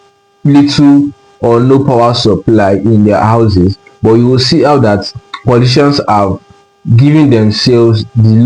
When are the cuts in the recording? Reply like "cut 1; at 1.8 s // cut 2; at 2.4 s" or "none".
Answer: none